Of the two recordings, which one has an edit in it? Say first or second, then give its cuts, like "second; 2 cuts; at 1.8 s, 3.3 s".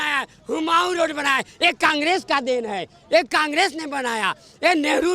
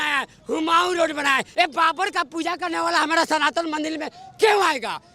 second; 1 cut; at 1.5 s